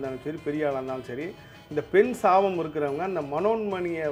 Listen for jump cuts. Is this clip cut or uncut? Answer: uncut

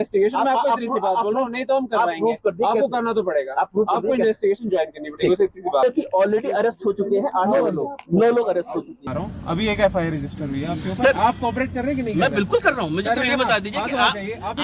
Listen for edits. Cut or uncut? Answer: cut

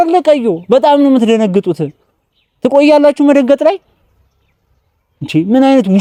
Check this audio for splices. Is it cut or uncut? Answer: uncut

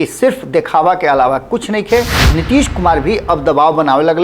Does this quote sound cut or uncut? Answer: cut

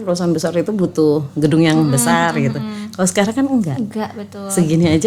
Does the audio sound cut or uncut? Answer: uncut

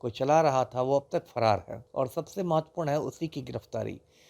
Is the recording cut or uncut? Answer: cut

